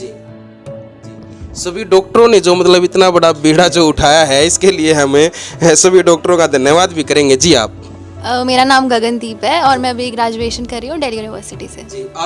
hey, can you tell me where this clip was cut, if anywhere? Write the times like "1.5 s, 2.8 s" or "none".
none